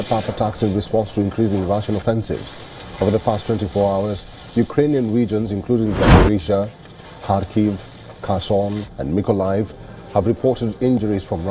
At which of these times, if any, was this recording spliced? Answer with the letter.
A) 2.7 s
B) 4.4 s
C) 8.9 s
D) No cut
D